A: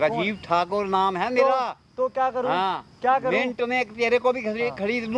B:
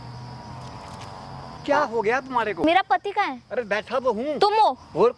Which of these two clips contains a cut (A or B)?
B